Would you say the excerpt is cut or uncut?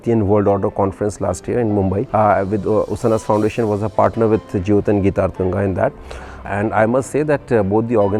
cut